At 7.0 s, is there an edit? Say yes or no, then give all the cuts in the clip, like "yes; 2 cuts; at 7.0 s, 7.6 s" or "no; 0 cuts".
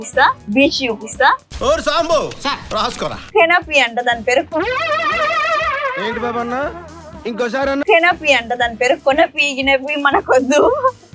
no; 1 cut; at 3.2 s